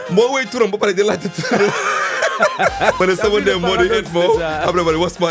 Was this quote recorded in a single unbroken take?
no; 1 cut; at 3.0 s

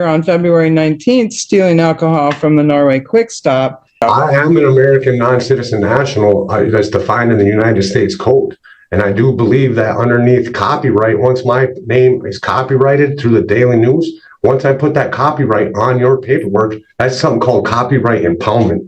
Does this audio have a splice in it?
yes; 1 cut; at 4.0 s

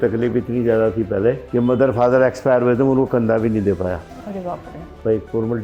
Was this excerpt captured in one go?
yes; 0 cuts

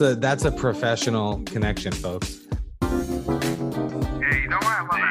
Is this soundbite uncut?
no; 1 cut; at 2.2 s

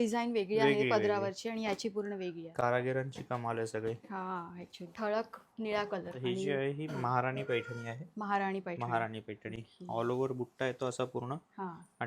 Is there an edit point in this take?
no; 0 cuts

